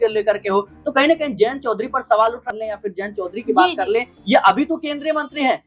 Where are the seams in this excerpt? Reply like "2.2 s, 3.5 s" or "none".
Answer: 2.5 s